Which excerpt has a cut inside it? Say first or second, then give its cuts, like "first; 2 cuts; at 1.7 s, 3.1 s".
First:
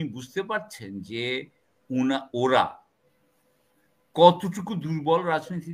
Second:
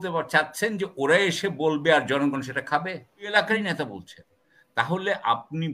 second; 1 cut; at 3.3 s